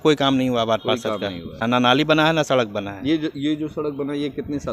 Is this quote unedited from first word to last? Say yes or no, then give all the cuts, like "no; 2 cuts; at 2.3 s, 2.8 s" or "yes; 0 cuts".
no; 1 cut; at 1.6 s